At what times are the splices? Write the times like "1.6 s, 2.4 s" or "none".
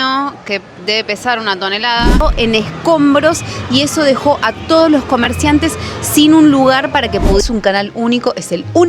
2.2 s, 7.4 s